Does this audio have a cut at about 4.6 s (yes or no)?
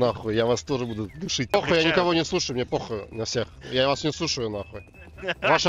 no